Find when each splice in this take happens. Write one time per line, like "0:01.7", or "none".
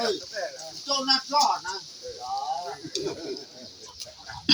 none